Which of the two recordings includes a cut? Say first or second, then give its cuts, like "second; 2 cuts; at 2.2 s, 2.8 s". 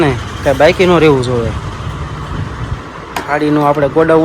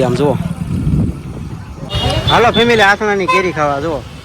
second; 1 cut; at 1.8 s